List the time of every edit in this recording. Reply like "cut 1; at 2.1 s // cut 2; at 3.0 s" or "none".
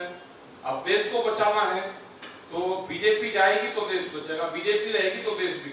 none